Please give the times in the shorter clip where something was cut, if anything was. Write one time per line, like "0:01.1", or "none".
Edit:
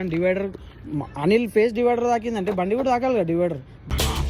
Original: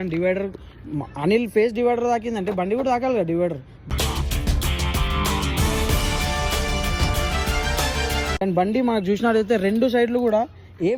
none